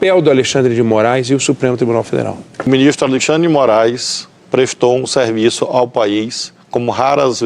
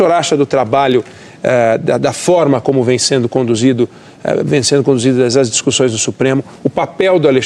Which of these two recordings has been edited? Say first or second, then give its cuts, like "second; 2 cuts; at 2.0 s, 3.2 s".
first; 1 cut; at 2.7 s